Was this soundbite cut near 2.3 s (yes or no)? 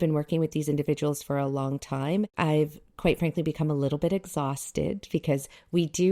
yes